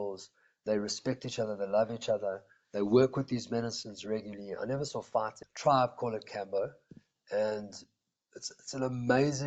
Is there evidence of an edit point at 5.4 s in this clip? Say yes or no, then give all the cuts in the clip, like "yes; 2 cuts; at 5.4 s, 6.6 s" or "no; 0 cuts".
yes; 1 cut; at 5.4 s